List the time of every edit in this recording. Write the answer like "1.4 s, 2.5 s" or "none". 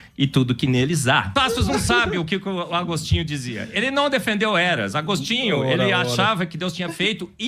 1.3 s

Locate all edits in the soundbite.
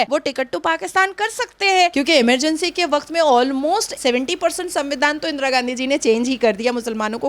1.9 s

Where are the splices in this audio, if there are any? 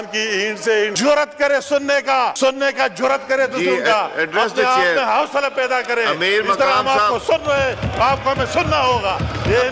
0.9 s, 2.3 s

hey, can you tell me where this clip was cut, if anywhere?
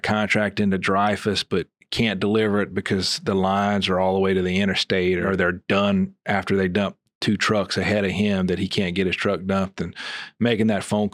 5.2 s

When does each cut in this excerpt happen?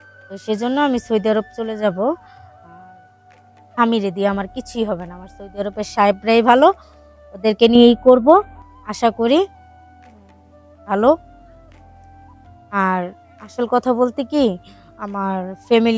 11.2 s, 12.7 s

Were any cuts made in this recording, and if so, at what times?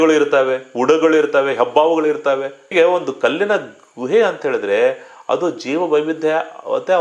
2.7 s

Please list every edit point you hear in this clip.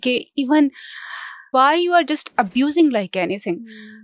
1.3 s

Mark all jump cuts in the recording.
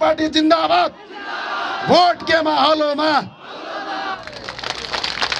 4.2 s

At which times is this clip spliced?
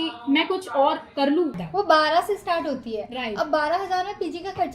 1.6 s

